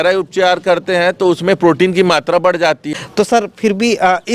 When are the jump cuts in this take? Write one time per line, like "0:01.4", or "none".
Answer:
0:02.8